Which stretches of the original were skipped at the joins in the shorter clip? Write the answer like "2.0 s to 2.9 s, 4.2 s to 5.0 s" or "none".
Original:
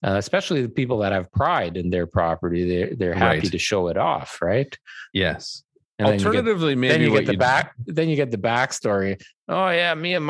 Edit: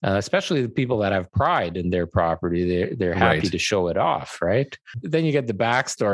4.9 s to 7.8 s